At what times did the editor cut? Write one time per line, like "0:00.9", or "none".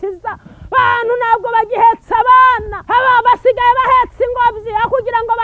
0:02.7